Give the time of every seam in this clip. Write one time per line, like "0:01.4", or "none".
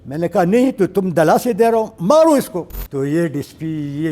0:02.8